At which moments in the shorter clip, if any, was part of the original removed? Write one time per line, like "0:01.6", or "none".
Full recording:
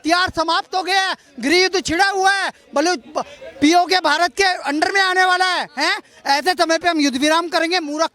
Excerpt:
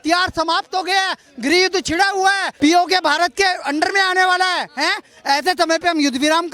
0:02.5

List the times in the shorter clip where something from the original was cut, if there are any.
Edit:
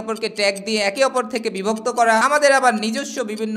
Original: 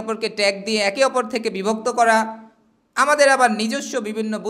0:02.2

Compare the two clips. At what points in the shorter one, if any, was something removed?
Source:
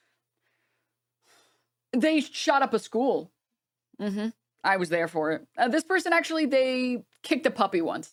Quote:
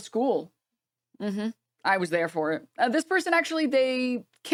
none

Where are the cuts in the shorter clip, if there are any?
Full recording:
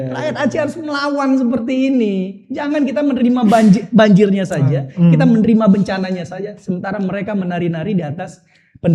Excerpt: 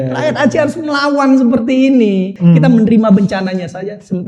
0:02.3

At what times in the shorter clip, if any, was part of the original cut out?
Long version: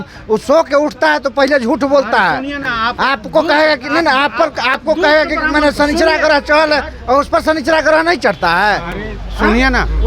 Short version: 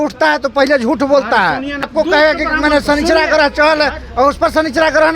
0:01.8

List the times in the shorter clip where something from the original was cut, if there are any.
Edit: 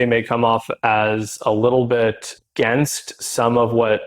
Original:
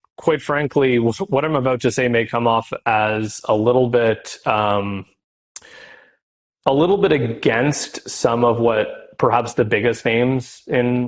0:02.4

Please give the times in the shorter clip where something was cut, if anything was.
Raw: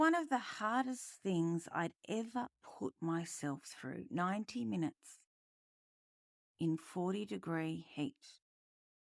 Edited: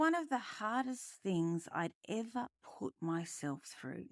none

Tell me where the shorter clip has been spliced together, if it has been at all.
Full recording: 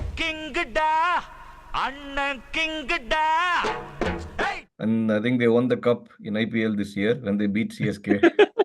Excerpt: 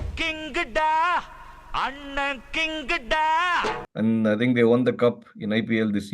0:03.9

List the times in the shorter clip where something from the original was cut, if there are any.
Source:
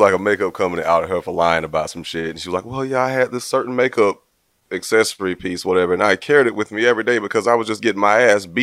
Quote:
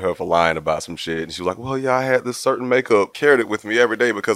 0:03.2

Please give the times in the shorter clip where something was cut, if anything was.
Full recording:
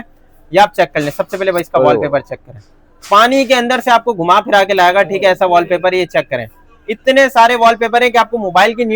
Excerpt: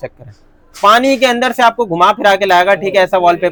none

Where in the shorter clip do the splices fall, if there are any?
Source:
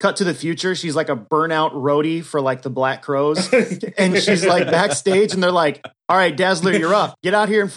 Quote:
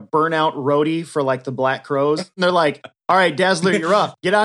0:02.3

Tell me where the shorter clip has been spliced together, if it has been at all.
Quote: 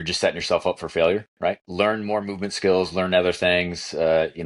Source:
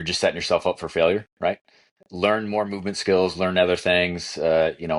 0:01.6

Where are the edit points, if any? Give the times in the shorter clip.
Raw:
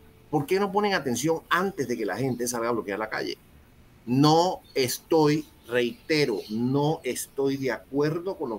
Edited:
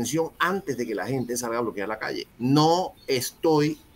0:02.3

